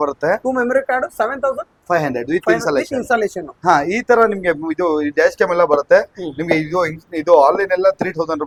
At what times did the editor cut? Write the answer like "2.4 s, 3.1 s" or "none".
none